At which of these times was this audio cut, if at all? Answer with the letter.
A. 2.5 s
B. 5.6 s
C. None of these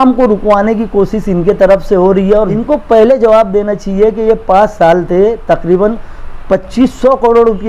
A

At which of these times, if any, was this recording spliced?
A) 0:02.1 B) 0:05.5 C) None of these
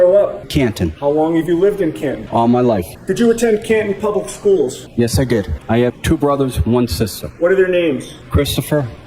B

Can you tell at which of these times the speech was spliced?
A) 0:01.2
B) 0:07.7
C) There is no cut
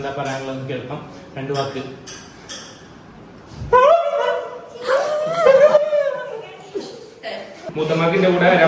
B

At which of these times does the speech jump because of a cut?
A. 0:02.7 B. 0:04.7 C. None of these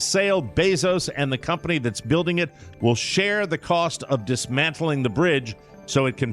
C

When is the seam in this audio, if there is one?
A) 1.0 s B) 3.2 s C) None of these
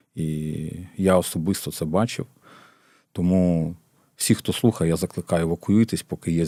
C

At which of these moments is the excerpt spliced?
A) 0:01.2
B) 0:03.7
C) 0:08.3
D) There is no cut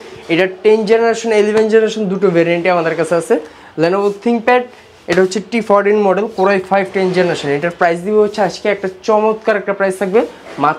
D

